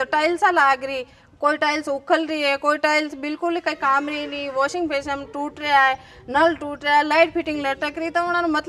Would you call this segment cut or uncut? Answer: uncut